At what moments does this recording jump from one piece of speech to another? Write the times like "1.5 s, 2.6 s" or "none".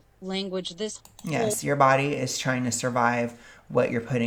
none